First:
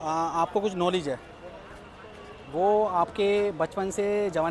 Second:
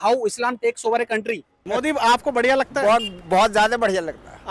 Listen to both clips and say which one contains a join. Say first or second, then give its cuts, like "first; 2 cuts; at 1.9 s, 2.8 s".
second; 1 cut; at 1.5 s